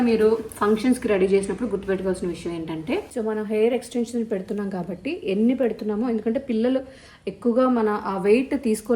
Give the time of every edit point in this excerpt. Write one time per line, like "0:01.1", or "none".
0:03.1